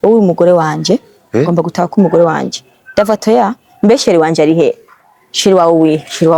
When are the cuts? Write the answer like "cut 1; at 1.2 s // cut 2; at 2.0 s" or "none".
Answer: none

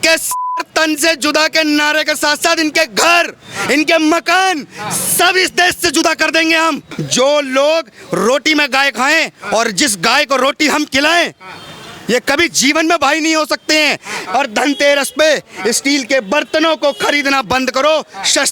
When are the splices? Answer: cut 1; at 6.9 s // cut 2; at 14.2 s

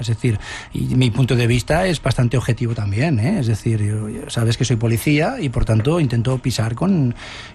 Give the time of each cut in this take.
none

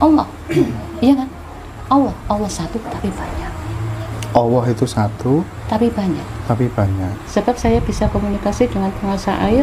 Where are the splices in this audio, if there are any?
cut 1; at 7.2 s

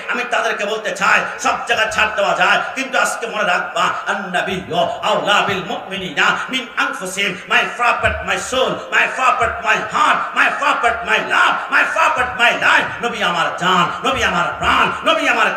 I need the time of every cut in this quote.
none

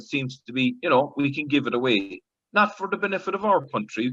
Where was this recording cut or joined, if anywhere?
none

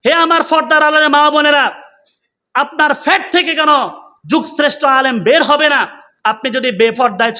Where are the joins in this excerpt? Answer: cut 1; at 6.1 s

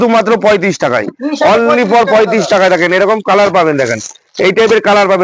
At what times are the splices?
none

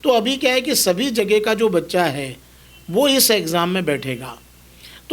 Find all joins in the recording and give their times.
none

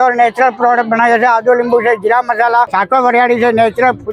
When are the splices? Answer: cut 1; at 2.7 s

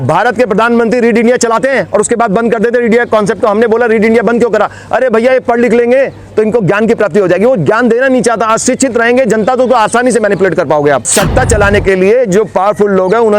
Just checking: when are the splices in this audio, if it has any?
cut 1; at 11.1 s

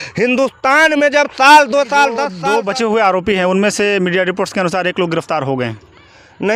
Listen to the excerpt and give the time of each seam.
cut 1; at 2.3 s

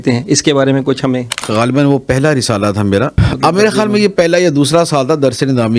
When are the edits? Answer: cut 1; at 1.5 s // cut 2; at 3.2 s

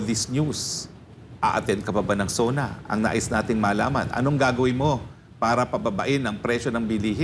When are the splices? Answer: none

